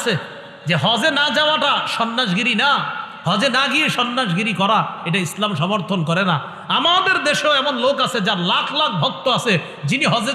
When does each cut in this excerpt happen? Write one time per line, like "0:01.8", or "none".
none